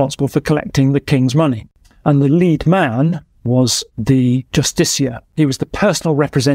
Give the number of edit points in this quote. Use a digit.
2